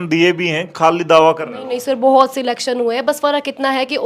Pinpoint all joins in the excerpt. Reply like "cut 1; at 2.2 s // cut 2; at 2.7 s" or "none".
none